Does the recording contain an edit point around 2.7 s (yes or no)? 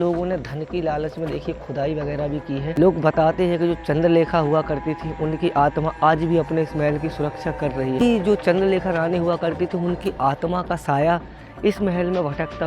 yes